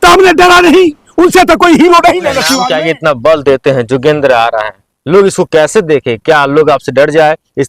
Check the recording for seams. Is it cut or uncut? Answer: cut